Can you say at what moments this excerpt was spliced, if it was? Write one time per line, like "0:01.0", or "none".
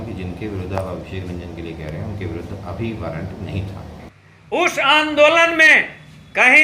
0:04.0